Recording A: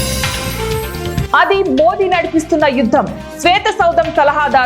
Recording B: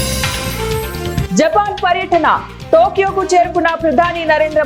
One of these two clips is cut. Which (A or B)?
A